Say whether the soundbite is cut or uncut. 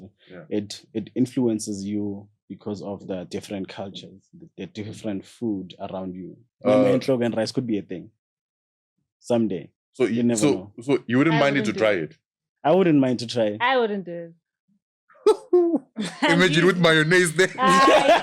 cut